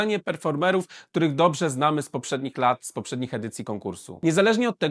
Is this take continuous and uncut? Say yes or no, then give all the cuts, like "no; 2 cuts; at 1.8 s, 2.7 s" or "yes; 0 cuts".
yes; 0 cuts